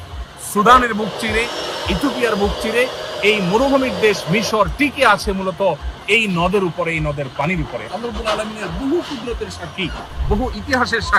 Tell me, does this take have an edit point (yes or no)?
yes